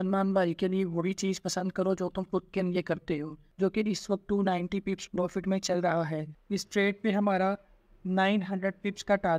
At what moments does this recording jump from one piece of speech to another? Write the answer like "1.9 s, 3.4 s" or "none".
3.4 s, 6.3 s